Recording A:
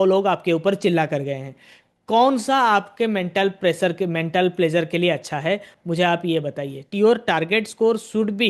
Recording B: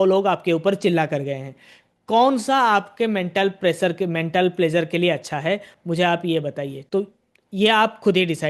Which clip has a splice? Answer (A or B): A